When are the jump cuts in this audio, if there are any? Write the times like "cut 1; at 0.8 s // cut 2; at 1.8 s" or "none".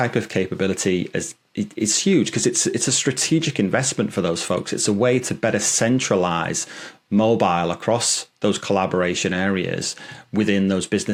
none